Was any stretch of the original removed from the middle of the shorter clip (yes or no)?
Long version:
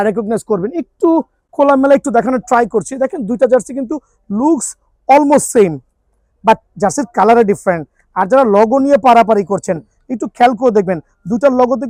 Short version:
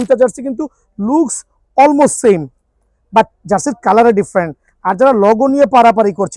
no